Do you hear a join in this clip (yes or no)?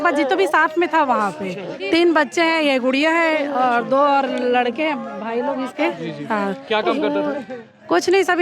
yes